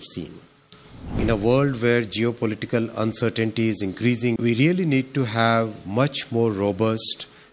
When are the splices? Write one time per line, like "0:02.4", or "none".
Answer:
0:01.2
0:04.4